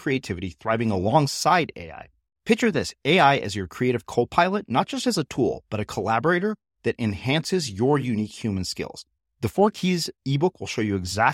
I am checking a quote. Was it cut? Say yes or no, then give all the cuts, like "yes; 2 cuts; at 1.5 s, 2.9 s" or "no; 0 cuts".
no; 0 cuts